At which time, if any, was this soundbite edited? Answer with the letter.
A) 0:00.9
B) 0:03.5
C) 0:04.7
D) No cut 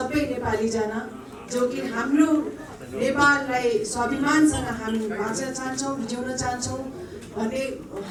D